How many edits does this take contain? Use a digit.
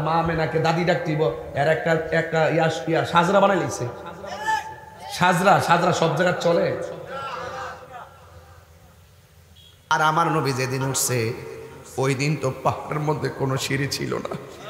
1